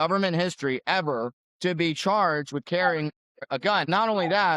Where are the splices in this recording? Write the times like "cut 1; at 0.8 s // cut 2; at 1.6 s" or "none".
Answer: cut 1; at 1.4 s // cut 2; at 3.6 s